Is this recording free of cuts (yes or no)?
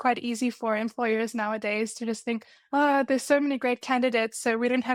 yes